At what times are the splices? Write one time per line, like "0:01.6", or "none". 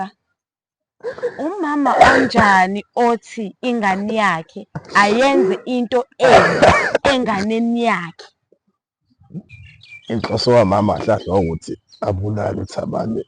0:09.5